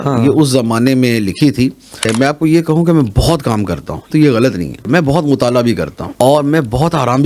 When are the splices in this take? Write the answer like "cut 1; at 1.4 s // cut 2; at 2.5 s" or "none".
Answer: cut 1; at 2.1 s // cut 2; at 4.0 s // cut 3; at 4.8 s // cut 4; at 6.0 s